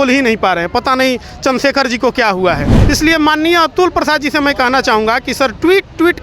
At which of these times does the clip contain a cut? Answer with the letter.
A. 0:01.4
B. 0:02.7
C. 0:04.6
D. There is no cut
B